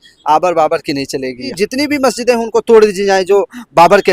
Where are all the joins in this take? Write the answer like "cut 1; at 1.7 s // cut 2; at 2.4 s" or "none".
cut 1; at 1.5 s